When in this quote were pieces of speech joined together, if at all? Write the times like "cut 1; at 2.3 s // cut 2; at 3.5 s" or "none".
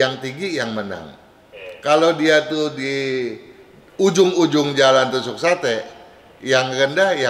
none

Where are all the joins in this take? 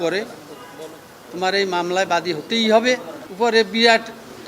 cut 1; at 3.2 s

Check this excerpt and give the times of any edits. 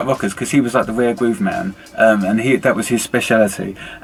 none

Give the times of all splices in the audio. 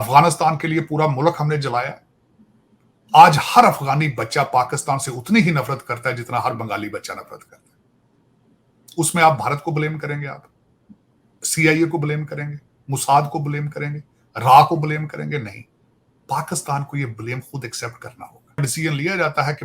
cut 1; at 18.6 s

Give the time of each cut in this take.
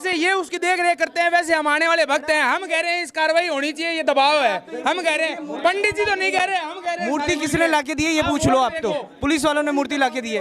none

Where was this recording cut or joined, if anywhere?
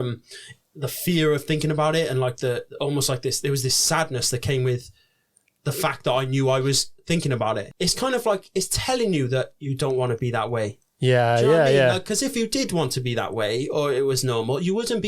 cut 1; at 7.7 s

